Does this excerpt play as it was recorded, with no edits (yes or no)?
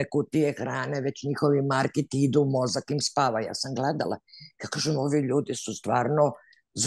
yes